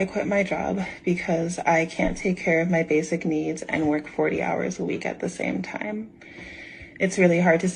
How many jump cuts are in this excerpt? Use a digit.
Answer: 1